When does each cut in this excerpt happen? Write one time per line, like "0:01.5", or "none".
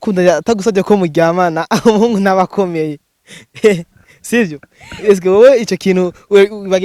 none